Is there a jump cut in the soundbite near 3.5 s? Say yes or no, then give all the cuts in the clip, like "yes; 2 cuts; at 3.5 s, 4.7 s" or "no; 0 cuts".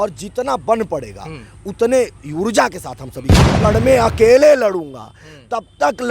yes; 1 cut; at 3.5 s